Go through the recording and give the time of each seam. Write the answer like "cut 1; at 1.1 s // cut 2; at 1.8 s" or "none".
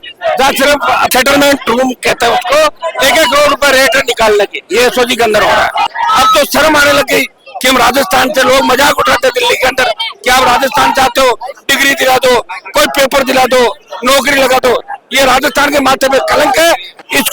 cut 1; at 1.1 s // cut 2; at 2.8 s // cut 3; at 5.9 s